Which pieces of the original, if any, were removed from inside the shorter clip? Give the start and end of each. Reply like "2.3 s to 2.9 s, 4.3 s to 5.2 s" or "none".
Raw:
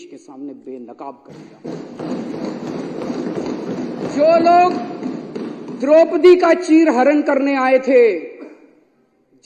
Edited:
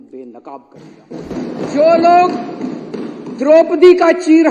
1.9 s to 3.7 s